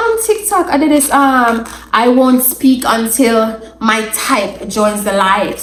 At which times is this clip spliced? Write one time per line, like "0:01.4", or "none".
none

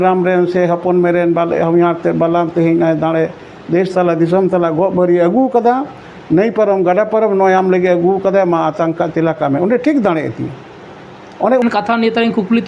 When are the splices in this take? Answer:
0:11.6

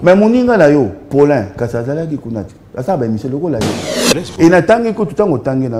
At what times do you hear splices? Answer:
0:03.9

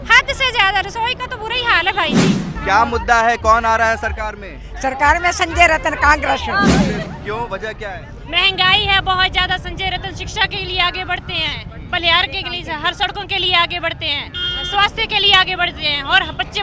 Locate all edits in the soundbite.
0:02.5
0:07.0

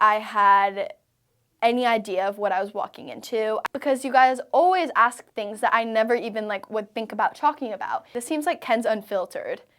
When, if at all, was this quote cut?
0:03.6
0:08.1

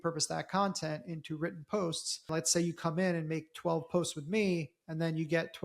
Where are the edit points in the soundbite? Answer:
0:02.3

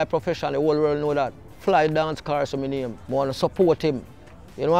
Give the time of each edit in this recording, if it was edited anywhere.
0:01.5
0:03.0

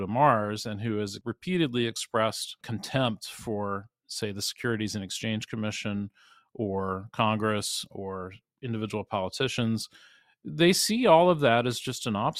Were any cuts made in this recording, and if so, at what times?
0:01.2
0:02.6

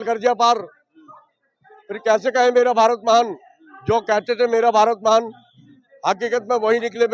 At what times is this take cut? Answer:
none

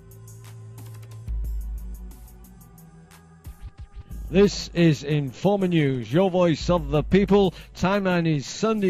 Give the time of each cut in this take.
none

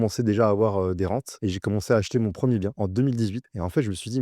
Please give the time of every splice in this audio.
0:01.3
0:02.9

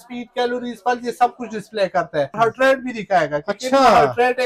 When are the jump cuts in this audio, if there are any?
0:02.3

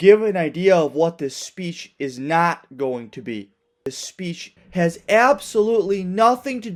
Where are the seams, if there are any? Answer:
none

